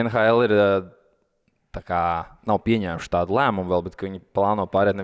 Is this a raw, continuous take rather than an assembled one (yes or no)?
yes